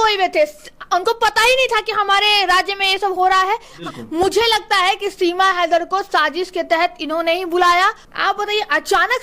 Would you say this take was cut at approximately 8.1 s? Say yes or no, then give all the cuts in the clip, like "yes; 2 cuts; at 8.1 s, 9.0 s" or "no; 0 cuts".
yes; 2 cuts; at 3.8 s, 8.1 s